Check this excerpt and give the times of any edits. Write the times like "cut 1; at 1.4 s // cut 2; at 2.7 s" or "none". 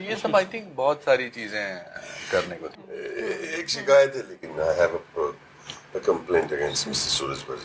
cut 1; at 2.6 s

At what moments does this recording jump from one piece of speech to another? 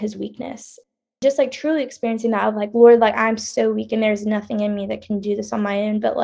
cut 1; at 1.1 s

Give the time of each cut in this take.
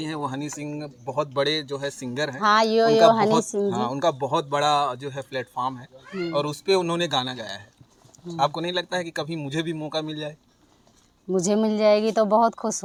none

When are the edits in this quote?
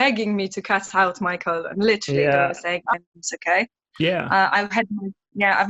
cut 1; at 2.9 s

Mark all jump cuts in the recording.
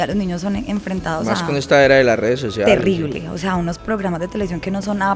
none

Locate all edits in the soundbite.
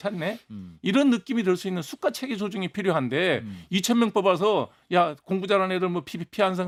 none

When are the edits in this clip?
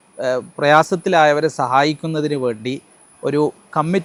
none

